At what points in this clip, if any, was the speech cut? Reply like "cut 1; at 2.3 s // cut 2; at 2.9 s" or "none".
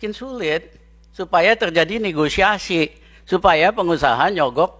none

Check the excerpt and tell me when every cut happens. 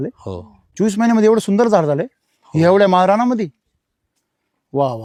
none

